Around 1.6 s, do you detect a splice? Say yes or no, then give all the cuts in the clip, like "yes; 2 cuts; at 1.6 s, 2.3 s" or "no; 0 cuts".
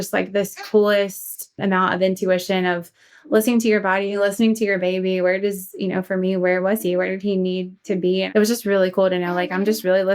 yes; 1 cut; at 1.6 s